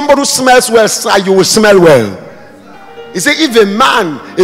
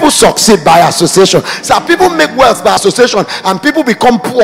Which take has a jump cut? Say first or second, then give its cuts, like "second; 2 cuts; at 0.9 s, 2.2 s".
second; 1 cut; at 2.8 s